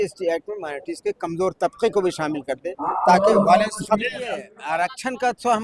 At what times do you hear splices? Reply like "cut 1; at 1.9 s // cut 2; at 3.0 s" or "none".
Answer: cut 1; at 4.5 s